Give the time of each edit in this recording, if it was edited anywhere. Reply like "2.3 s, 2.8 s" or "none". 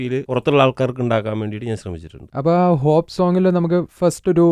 none